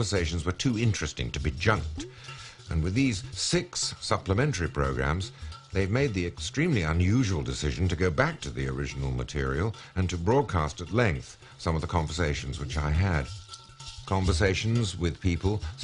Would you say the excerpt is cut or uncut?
cut